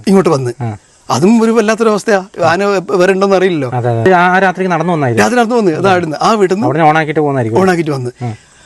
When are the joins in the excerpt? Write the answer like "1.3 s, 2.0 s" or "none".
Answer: 4.1 s